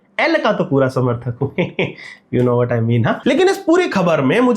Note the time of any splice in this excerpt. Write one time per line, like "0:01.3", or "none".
none